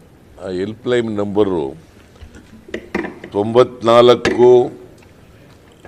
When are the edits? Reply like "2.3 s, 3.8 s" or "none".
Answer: none